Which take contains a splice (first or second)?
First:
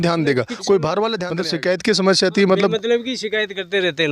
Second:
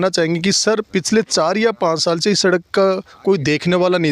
first